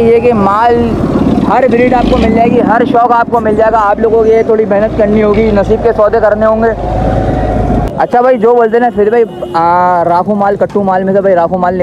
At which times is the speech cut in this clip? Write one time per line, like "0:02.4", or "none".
0:07.9